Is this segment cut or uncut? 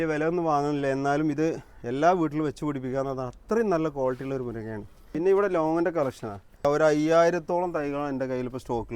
cut